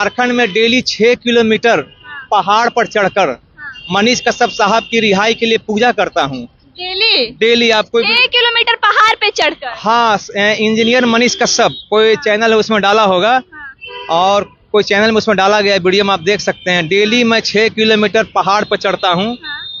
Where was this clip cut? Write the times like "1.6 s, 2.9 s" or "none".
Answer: none